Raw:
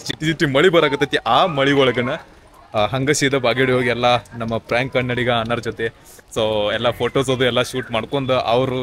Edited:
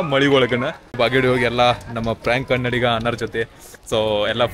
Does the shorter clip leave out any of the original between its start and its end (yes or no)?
yes